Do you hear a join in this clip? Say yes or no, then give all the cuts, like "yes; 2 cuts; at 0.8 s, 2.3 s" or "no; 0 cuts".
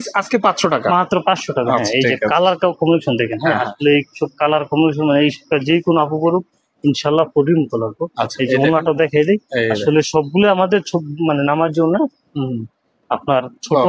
no; 0 cuts